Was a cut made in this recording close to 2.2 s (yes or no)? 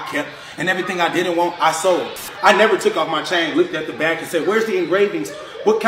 yes